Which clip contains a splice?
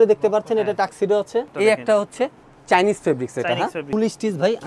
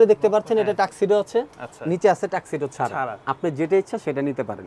first; 2 cuts; at 1.5 s, 3.8 s

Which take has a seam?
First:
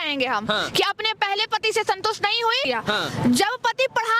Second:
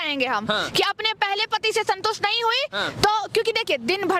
first; 1 cut; at 2.6 s

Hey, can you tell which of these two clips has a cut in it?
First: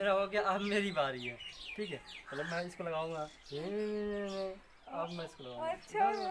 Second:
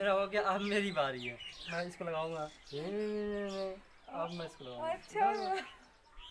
second; 1 cut; at 1.7 s

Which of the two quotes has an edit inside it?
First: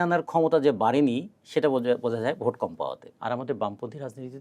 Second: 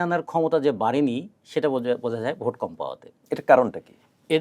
first; 1 cut; at 3.1 s

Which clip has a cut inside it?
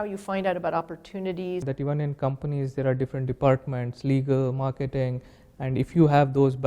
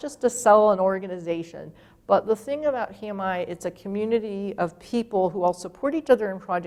first; 1 cut; at 1.7 s

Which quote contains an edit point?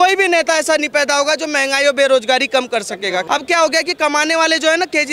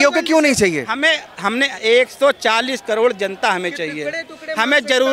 first; 1 cut; at 3.2 s

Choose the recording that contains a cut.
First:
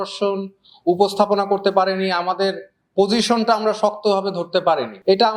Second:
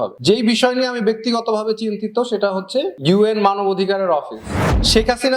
second; 2 cuts; at 2.9 s, 4.5 s

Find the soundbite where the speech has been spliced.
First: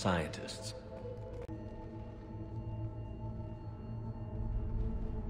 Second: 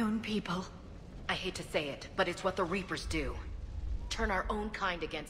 first; 1 cut; at 1.5 s

